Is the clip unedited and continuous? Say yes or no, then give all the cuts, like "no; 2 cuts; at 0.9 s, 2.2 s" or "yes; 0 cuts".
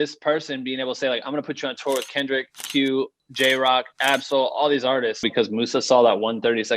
no; 1 cut; at 5.3 s